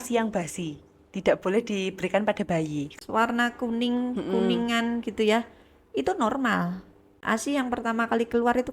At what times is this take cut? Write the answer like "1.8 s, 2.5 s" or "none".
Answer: 2.9 s, 7.2 s

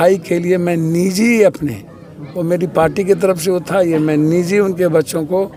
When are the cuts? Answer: none

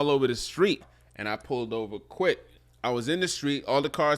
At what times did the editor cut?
0.8 s, 2.5 s

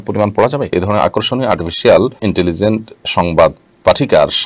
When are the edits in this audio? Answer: 0.7 s, 2.2 s

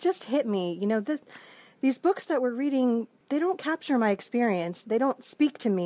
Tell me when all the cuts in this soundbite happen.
3.2 s, 4.8 s

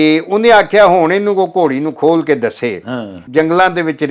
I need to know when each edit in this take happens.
3.1 s

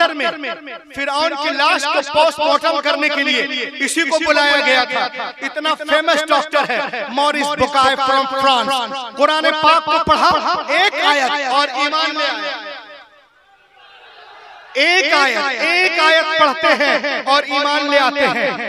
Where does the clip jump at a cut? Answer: none

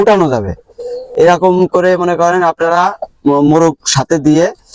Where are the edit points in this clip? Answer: none

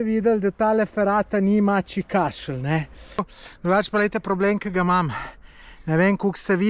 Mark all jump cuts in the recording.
3.3 s

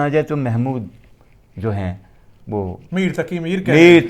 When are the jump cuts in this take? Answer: none

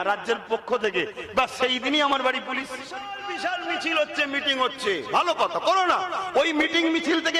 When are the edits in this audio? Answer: 3.2 s

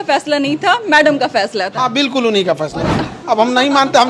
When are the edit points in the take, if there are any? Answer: 3.0 s

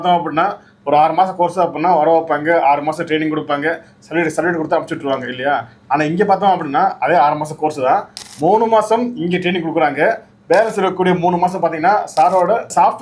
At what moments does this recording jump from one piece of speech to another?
none

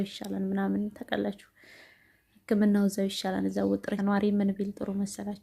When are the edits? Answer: 3.9 s

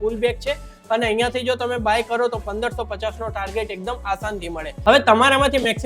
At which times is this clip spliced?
4.7 s

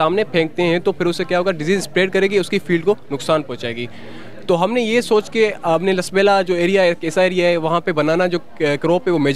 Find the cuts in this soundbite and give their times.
none

